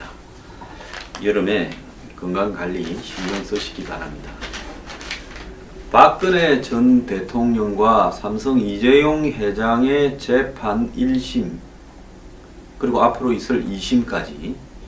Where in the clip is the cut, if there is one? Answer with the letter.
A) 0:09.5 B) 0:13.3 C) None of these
C